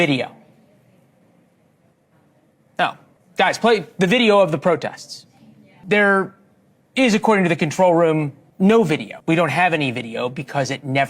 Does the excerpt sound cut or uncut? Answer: cut